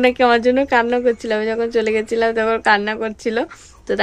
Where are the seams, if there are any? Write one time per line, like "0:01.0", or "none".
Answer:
none